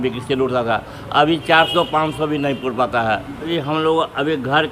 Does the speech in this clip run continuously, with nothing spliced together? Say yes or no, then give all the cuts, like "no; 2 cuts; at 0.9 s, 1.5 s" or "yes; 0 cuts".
no; 1 cut; at 3.5 s